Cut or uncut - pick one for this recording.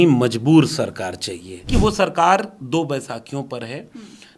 cut